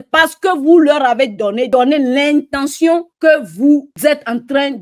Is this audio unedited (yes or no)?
no